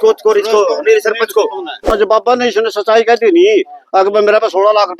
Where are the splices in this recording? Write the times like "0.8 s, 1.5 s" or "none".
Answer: 1.9 s